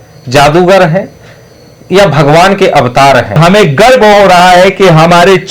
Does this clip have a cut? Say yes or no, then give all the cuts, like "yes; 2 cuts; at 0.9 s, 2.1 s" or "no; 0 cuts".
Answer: yes; 1 cut; at 3.4 s